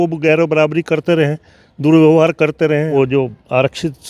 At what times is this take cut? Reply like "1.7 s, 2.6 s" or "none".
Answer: 2.9 s